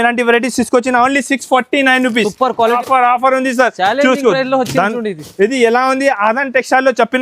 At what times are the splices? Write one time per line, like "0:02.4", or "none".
0:02.8